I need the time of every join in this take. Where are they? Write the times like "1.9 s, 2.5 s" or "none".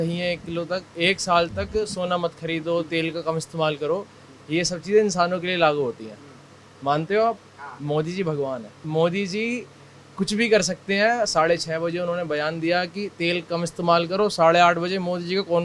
8.8 s